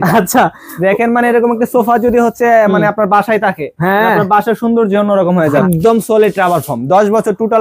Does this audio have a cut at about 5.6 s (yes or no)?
yes